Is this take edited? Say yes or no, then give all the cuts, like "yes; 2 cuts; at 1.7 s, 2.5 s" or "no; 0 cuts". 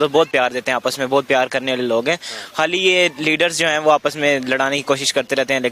yes; 1 cut; at 1.0 s